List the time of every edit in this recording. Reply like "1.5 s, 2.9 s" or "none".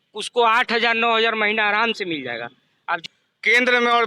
3.1 s

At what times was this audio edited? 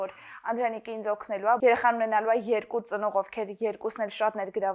1.6 s

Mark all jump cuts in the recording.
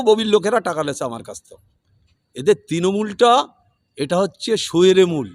none

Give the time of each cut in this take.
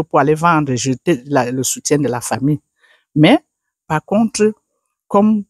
none

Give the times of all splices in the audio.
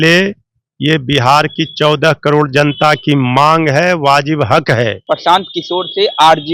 5.0 s

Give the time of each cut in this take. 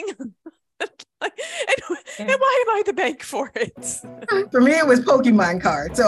4.5 s

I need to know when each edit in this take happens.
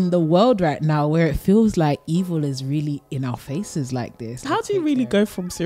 4.5 s

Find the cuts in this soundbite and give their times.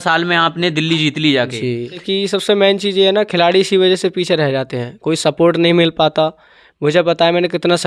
2.0 s

